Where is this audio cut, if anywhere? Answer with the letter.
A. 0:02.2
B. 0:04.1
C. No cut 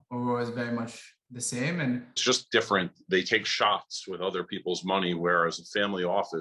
A